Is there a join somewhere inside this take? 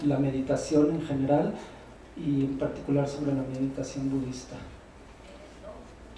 no; 0 cuts

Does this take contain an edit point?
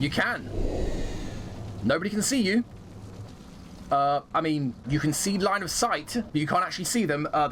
no; 0 cuts

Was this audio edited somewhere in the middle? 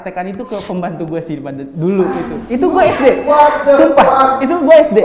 no; 0 cuts

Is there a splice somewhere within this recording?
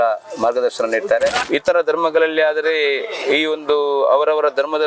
yes; 1 cut; at 1.4 s

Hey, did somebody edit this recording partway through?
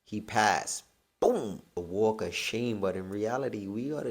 yes; 1 cut; at 1.7 s

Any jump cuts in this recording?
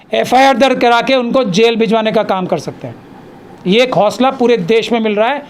no; 0 cuts

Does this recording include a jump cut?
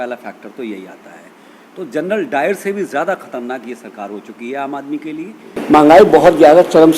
yes; 1 cut; at 5.6 s

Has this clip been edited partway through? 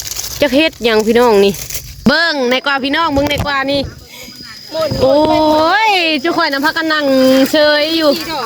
yes; 1 cut; at 2.1 s

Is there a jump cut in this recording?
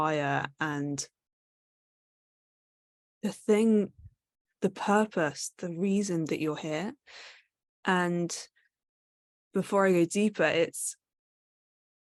no; 0 cuts

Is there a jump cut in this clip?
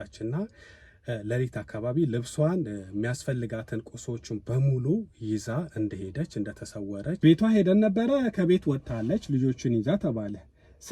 yes; 1 cut; at 7.2 s

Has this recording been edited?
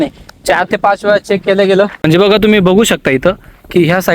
yes; 1 cut; at 2.1 s

